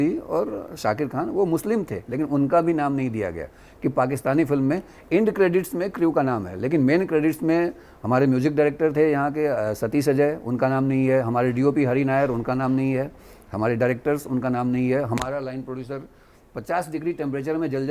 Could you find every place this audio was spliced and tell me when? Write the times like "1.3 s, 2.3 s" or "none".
none

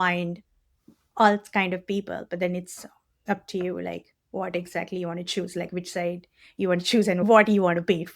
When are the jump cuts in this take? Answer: 7.2 s

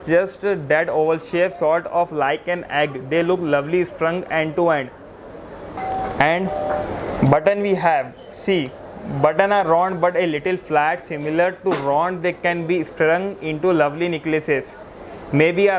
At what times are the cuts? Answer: none

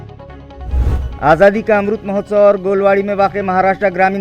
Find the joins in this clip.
1.1 s

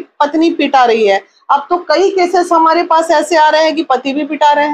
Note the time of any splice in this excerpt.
none

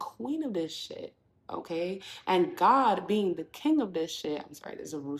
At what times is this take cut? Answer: none

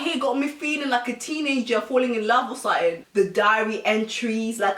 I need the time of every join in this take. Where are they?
3.0 s

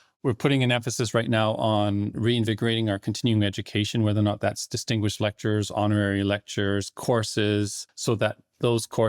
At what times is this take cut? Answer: 7.9 s

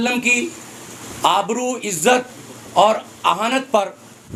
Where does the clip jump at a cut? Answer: none

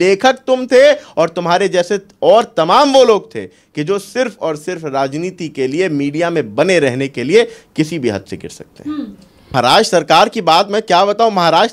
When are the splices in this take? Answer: 9.5 s

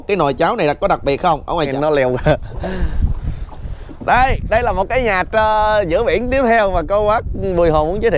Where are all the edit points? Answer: 1.7 s

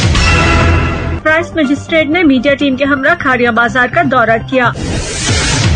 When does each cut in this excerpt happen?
1.2 s, 4.7 s

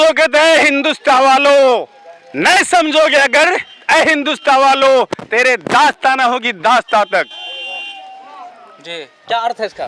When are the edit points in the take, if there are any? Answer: none

